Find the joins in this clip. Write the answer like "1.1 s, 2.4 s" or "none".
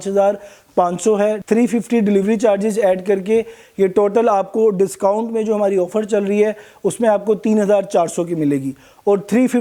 none